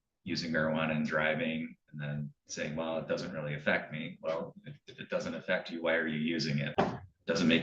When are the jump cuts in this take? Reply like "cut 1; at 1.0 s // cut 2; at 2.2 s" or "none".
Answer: cut 1; at 6.7 s